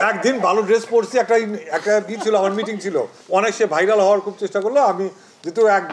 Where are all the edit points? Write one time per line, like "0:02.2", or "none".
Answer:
0:03.2